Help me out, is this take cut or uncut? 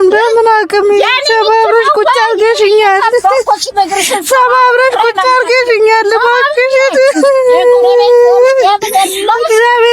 uncut